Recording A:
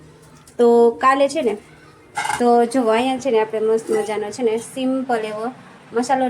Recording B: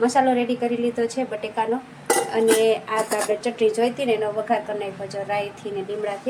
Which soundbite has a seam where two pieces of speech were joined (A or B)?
A